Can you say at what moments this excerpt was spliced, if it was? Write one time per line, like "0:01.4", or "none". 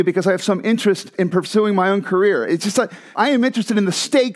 0:01.1
0:03.1